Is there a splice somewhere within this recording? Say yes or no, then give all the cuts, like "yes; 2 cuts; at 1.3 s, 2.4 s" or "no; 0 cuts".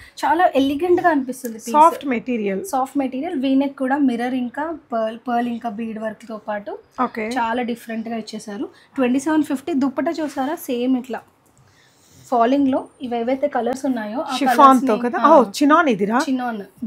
no; 0 cuts